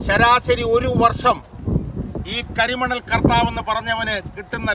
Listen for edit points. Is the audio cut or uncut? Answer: uncut